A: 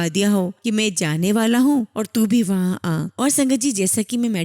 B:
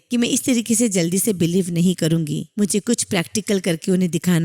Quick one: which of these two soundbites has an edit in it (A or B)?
A